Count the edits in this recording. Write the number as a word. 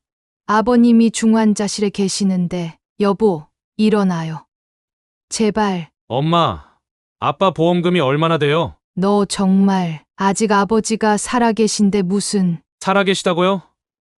two